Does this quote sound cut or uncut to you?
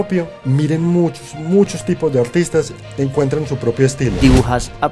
cut